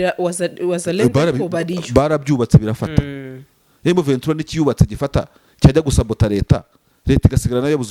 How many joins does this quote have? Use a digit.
0